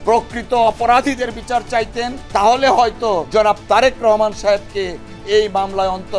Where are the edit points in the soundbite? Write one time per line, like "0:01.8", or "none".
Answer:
0:02.4
0:03.3